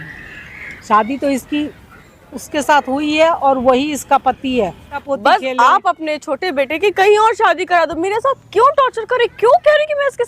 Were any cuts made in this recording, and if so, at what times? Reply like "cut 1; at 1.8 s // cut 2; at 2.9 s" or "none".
cut 1; at 5.0 s